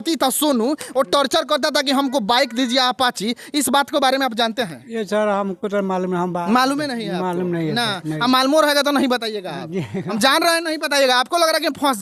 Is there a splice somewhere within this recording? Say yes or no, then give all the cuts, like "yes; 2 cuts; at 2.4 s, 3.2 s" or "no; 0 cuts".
no; 0 cuts